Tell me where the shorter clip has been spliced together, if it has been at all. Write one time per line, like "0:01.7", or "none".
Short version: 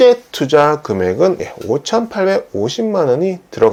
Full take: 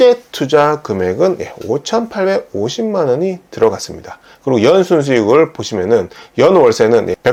none